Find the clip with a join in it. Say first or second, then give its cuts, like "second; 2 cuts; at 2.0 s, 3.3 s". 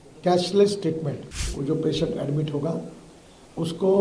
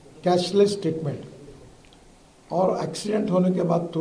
first; 1 cut; at 1.5 s